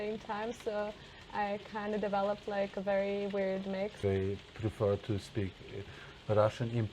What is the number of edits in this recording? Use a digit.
1